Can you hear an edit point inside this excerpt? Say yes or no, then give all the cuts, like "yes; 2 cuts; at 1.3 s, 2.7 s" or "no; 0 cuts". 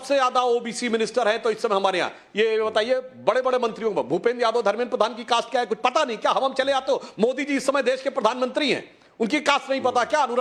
no; 0 cuts